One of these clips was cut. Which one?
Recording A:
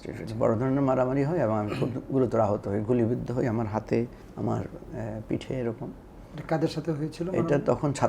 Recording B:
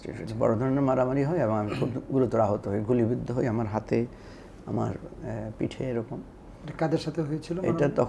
A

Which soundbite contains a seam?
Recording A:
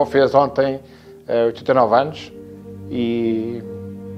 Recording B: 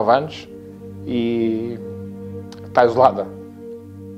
B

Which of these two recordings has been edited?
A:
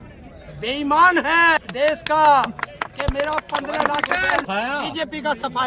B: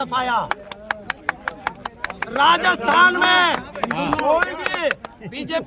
A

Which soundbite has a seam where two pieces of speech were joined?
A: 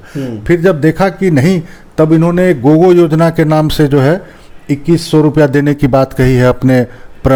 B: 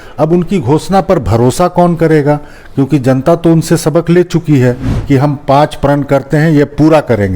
B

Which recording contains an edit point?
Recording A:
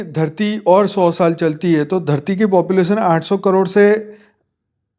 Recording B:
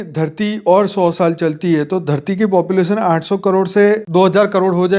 B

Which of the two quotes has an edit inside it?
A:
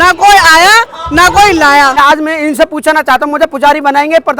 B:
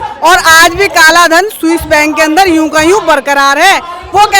A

